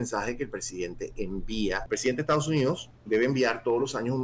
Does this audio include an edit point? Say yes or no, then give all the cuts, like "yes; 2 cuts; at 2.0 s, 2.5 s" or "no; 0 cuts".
yes; 2 cuts; at 1.8 s, 2.9 s